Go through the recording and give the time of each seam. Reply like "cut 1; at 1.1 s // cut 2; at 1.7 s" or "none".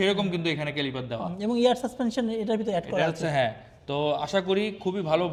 none